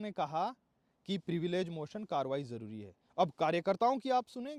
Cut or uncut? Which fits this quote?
uncut